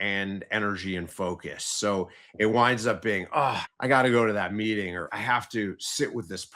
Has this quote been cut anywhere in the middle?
yes; 2 cuts; at 3.7 s, 5.1 s

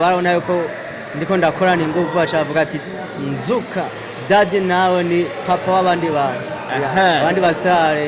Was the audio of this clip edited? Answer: no; 0 cuts

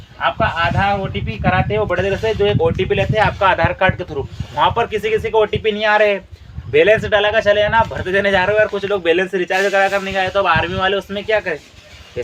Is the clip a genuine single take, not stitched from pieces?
yes; 0 cuts

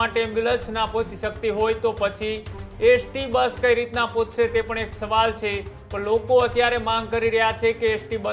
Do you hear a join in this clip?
no; 0 cuts

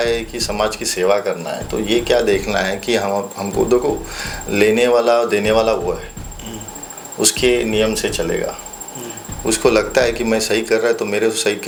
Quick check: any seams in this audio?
no; 0 cuts

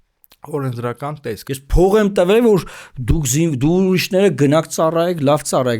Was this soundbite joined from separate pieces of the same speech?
yes; 1 cut; at 1.4 s

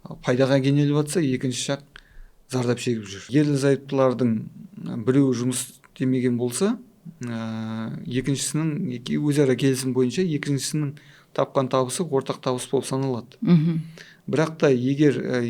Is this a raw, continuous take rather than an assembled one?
yes; 0 cuts

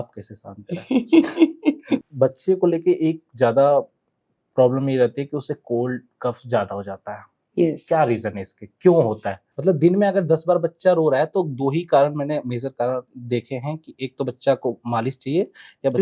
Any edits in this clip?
yes; 2 cuts; at 1.9 s, 9.4 s

